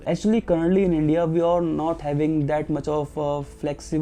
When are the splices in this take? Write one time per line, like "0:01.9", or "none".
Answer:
none